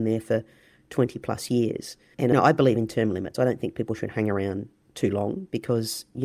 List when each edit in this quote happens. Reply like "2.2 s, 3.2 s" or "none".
2.3 s